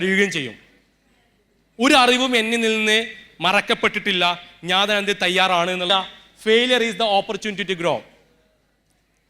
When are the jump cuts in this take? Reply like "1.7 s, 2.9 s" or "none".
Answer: 5.9 s

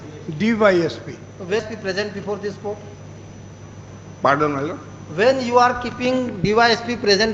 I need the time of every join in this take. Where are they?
1.6 s

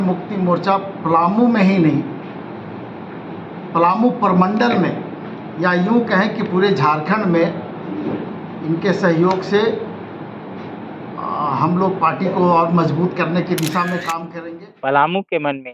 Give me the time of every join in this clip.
14.3 s

